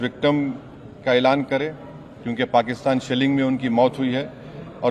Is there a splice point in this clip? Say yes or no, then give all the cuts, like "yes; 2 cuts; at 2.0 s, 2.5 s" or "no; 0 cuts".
no; 0 cuts